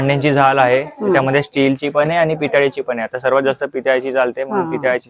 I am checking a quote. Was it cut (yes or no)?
no